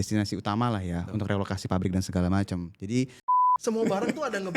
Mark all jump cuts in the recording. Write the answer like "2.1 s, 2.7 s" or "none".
3.4 s